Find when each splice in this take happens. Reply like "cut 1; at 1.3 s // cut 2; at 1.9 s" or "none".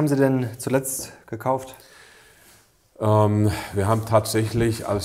none